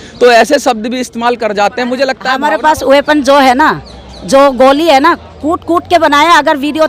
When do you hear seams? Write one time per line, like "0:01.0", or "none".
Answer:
0:02.3